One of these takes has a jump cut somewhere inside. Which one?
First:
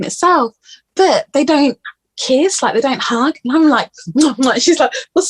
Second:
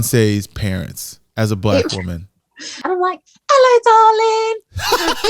second; 1 cut; at 2.8 s

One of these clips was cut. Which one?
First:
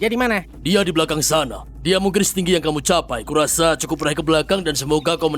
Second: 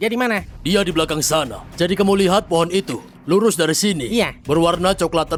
first; 2 cuts; at 1.6 s, 3.2 s

